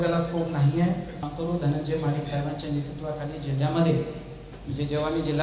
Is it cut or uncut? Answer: cut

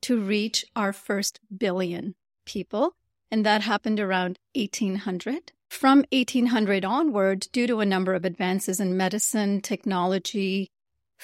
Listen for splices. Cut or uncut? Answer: cut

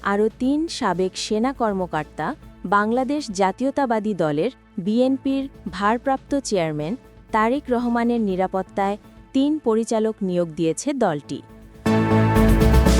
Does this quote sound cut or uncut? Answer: cut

